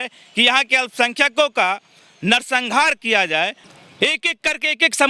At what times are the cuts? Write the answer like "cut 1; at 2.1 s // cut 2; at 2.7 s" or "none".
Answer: cut 1; at 3.6 s